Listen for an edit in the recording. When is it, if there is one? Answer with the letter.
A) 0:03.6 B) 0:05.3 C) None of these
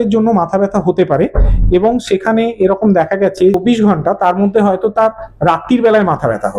A